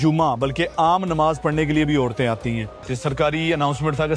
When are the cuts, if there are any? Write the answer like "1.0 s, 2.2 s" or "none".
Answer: 2.9 s